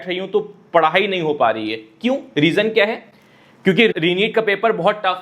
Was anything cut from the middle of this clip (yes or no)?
yes